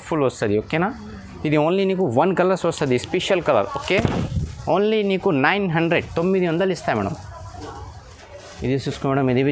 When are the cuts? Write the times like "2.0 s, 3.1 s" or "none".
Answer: none